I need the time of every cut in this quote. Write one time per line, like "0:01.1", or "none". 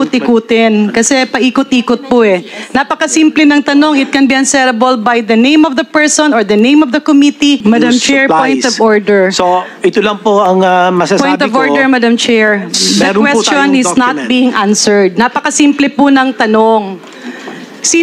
0:07.6